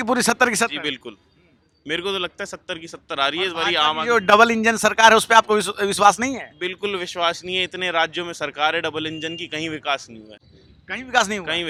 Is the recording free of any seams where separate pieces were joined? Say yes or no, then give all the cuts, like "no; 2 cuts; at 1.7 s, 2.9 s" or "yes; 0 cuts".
yes; 0 cuts